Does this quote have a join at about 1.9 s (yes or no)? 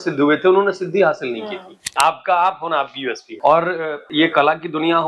yes